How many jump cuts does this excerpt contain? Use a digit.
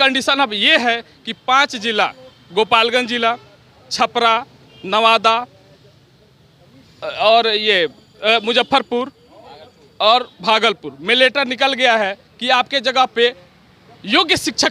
0